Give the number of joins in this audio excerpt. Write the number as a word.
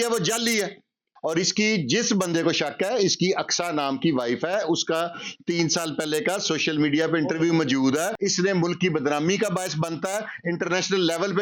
two